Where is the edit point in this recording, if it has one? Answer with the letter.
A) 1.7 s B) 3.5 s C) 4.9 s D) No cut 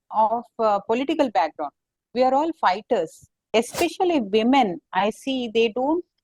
B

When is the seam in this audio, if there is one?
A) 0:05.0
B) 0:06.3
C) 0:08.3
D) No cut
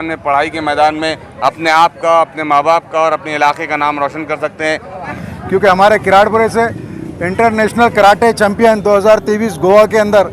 A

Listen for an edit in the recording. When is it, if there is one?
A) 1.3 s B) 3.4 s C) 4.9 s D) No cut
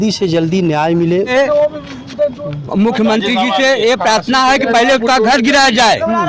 A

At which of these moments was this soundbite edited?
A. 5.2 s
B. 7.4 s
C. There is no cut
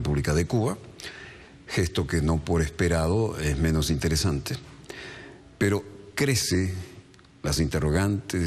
B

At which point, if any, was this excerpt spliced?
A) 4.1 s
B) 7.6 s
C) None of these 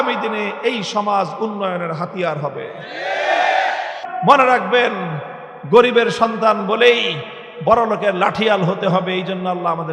A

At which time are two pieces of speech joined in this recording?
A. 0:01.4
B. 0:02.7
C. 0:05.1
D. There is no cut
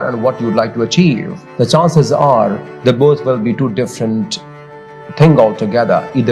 A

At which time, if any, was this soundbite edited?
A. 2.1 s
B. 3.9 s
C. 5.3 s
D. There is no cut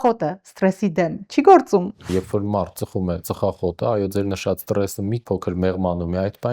A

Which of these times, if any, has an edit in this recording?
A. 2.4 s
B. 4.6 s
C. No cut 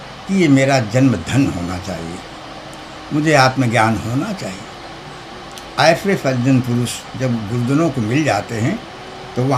C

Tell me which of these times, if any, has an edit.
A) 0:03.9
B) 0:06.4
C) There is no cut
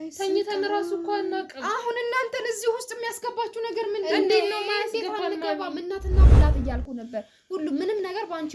B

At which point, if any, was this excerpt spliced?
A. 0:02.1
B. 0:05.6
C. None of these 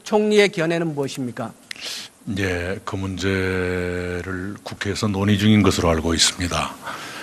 B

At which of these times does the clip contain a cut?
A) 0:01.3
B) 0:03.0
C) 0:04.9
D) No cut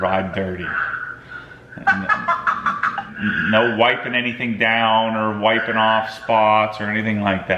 B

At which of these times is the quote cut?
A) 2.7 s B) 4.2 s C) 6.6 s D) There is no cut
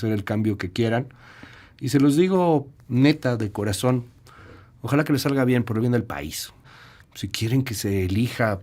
C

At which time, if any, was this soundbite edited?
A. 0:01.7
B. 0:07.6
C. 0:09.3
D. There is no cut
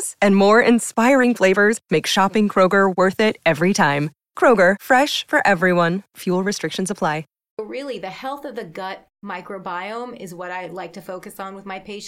B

